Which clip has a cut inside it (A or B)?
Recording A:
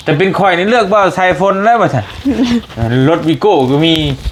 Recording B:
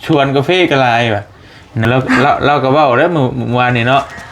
B